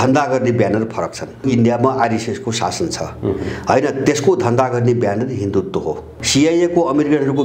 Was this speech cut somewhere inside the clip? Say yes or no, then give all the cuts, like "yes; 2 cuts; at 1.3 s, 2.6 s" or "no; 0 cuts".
yes; 2 cuts; at 1.4 s, 6.1 s